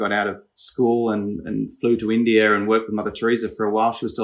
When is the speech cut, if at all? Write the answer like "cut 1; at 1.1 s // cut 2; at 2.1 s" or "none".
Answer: none